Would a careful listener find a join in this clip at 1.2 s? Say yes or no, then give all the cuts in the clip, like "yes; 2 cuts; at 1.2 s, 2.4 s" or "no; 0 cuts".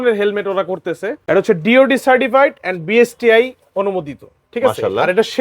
yes; 1 cut; at 1.2 s